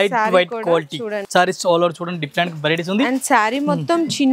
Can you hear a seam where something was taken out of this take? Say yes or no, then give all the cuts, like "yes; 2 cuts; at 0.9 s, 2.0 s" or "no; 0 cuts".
yes; 1 cut; at 1.2 s